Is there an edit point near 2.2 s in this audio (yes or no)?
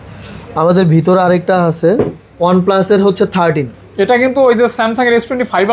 yes